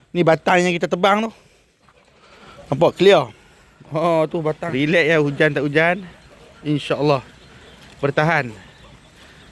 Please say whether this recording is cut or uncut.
cut